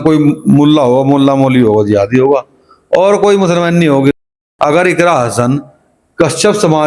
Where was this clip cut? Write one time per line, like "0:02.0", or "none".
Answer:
0:04.5